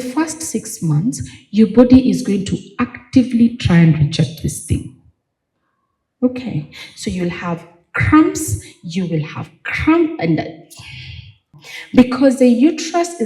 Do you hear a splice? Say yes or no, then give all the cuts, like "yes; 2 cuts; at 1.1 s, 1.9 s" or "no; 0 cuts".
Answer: yes; 1 cut; at 11.5 s